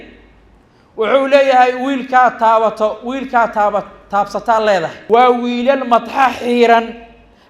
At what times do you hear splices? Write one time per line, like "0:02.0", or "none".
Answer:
0:05.0